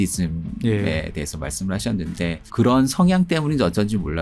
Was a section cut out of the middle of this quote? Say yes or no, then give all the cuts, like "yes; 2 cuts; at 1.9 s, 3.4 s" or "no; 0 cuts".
yes; 1 cut; at 2.4 s